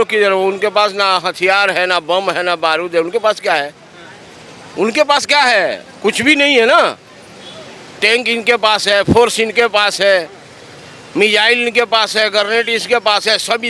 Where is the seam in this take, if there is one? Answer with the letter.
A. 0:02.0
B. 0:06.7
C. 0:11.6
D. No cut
D